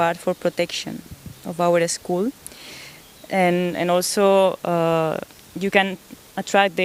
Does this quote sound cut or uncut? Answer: uncut